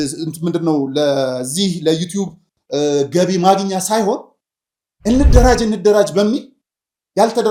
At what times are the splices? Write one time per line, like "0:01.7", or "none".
none

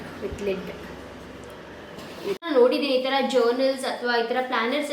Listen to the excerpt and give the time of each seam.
0:02.4

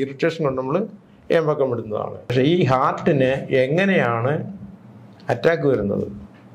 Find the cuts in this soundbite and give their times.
0:02.3

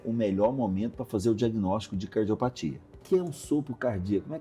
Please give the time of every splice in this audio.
0:03.0

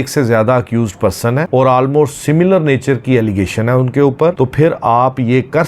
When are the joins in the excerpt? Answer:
0:01.5

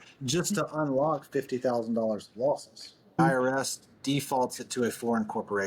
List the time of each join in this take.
0:03.2

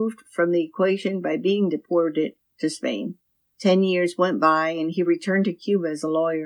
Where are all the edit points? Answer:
0:03.1

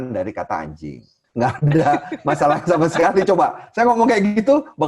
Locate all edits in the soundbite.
0:01.2

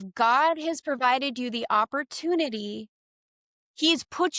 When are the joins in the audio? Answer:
none

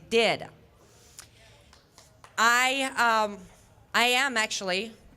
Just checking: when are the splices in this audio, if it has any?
0:02.9

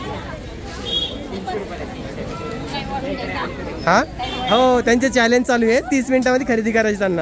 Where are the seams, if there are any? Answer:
none

